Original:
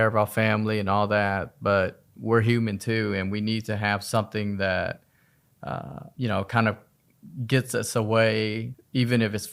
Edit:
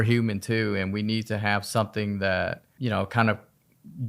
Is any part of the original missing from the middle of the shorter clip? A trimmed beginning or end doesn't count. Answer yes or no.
yes